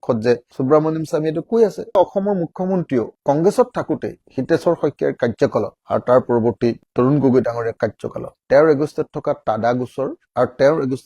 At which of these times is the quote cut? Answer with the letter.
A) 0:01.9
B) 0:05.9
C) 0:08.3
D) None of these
A